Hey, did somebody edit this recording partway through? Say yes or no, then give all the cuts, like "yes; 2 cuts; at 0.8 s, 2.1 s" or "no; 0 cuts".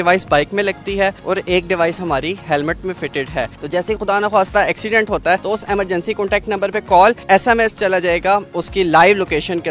yes; 4 cuts; at 3.5 s, 5.4 s, 7.2 s, 8.5 s